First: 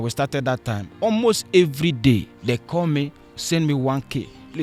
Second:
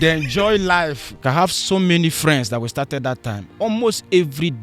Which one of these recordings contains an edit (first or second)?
second